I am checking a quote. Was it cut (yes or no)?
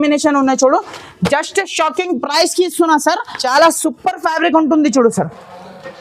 yes